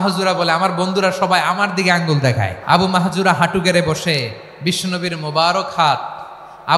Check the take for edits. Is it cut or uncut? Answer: cut